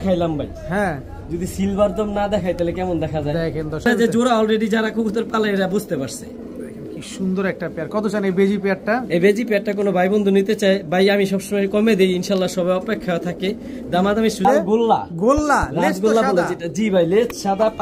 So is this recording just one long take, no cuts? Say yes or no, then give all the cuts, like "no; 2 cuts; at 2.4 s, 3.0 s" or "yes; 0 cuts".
no; 2 cuts; at 3.8 s, 14.4 s